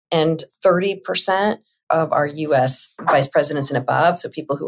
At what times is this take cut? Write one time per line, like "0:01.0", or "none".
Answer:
none

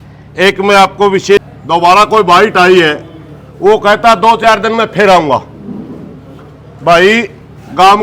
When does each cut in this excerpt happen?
0:01.4

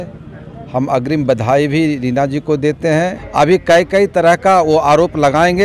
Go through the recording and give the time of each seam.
0:03.2

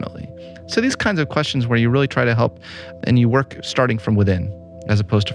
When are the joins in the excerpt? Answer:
0:03.0

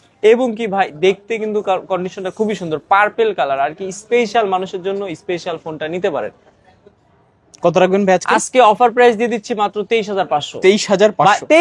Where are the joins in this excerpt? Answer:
none

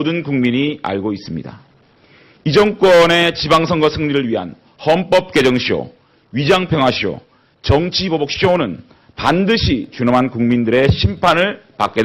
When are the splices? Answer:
0:04.0

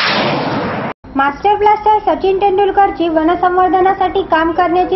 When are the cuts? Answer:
0:00.9

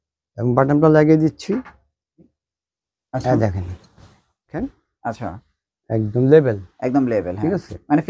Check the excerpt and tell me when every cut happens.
0:04.6

